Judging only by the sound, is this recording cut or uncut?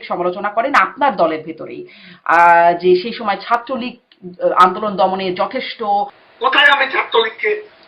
cut